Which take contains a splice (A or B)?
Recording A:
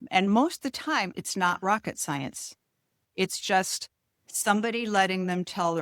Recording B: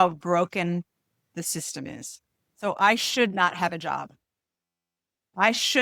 A